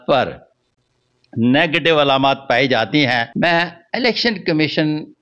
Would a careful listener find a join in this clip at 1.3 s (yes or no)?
no